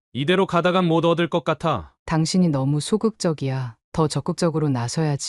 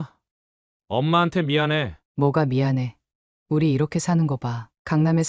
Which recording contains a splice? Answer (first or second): first